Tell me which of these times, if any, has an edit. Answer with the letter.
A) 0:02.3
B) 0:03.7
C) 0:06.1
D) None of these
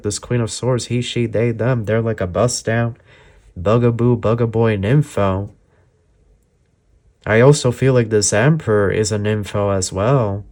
D